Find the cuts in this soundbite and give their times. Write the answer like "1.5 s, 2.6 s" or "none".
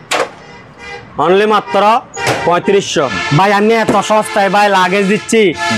3.2 s